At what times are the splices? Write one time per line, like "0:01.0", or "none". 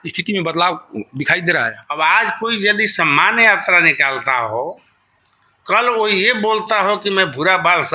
0:01.8